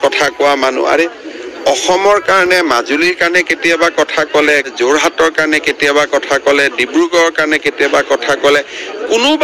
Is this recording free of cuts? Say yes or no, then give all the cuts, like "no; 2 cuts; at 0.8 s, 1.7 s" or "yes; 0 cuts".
no; 1 cut; at 4.7 s